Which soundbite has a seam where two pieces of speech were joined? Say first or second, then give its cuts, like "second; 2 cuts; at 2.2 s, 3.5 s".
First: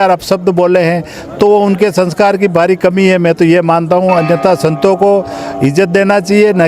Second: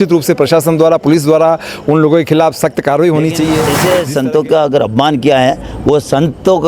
second; 1 cut; at 3.7 s